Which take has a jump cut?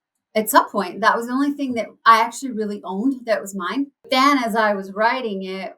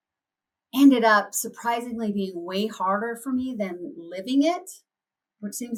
first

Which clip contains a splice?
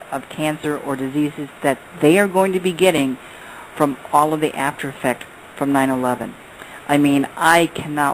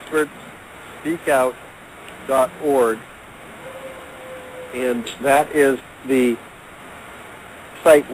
first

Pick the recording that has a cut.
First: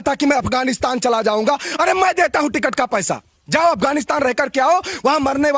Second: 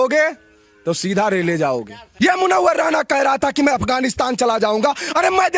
second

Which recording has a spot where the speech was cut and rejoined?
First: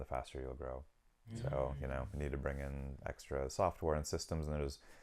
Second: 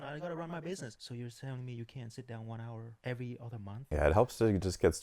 second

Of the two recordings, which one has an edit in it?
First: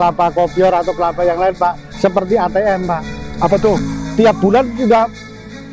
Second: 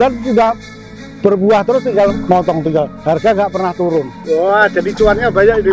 second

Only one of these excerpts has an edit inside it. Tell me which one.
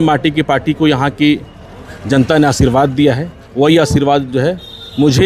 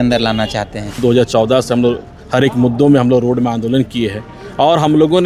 second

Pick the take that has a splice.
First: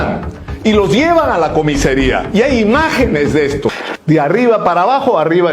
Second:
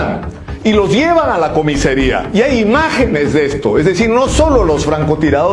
first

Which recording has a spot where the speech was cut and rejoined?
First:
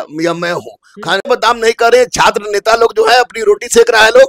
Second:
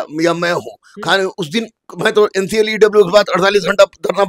first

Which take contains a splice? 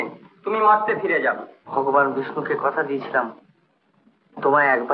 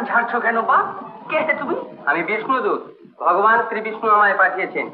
first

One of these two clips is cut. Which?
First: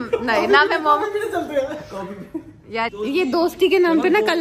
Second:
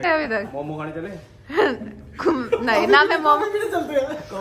first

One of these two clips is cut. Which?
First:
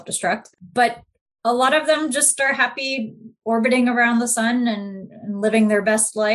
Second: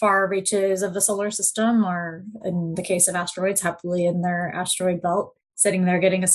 second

